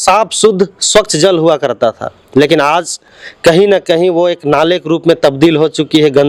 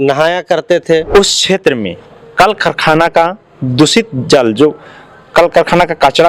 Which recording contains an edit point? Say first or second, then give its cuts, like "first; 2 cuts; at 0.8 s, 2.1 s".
second; 1 cut; at 1.1 s